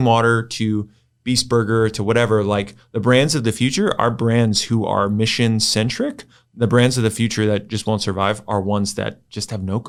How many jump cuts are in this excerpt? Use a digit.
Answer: 0